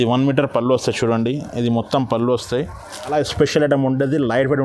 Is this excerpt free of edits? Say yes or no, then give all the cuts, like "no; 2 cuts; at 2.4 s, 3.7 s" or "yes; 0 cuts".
no; 1 cut; at 3.1 s